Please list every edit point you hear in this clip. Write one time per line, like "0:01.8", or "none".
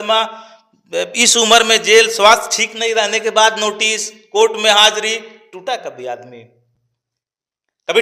none